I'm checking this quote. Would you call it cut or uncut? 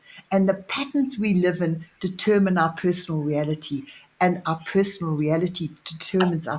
uncut